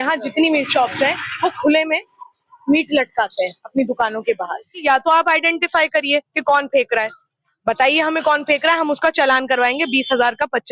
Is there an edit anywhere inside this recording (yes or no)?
yes